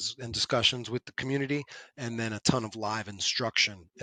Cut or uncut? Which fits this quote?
uncut